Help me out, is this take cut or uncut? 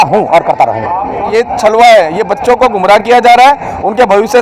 cut